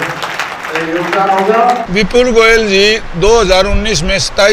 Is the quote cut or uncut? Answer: cut